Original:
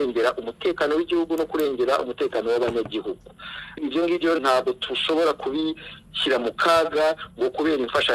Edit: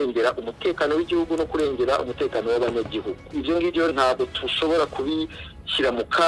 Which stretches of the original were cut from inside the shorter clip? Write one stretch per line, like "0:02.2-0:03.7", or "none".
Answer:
0:03.2-0:03.7